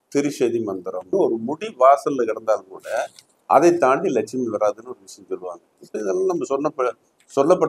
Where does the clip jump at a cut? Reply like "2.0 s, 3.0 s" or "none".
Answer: 1.1 s